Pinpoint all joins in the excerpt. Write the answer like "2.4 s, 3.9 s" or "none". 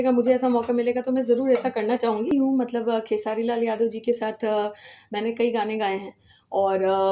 2.3 s